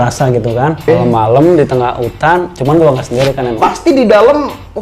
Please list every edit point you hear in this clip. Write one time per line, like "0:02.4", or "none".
0:00.9
0:03.5